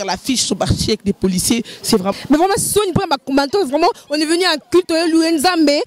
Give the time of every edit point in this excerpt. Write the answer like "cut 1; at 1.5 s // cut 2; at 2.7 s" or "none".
cut 1; at 2.1 s